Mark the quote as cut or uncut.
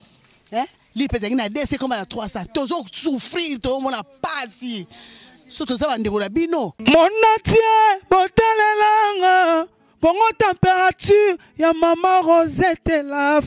cut